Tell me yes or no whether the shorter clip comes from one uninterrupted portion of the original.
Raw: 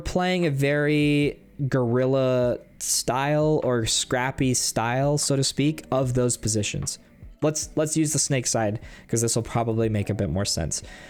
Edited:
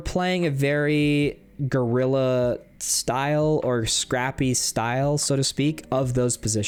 yes